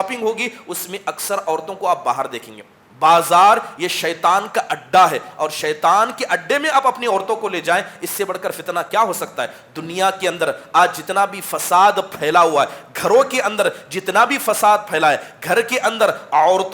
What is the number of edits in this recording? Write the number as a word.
zero